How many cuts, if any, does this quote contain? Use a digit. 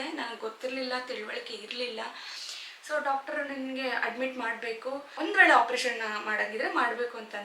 1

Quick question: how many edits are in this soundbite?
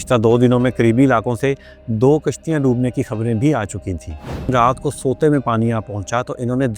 1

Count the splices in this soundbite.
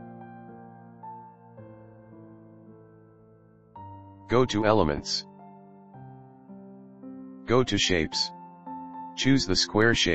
3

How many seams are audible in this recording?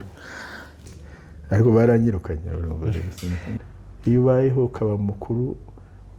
2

